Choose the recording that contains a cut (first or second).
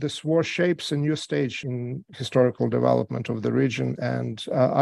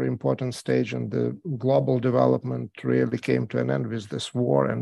first